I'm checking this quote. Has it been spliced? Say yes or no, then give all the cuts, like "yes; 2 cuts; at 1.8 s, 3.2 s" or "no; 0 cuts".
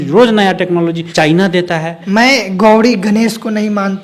yes; 2 cuts; at 1.0 s, 2.0 s